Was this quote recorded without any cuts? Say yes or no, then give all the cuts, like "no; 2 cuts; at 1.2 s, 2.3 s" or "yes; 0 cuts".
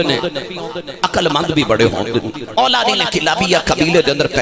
no; 1 cut; at 2.4 s